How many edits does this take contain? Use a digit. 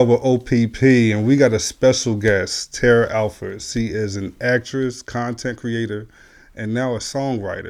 0